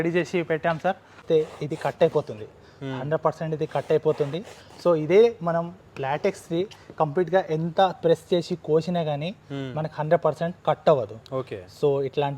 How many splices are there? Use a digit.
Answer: 1